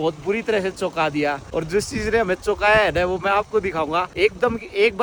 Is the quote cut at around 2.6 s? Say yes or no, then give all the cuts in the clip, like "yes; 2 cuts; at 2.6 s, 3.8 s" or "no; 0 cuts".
no; 0 cuts